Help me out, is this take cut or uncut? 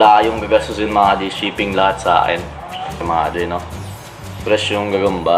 cut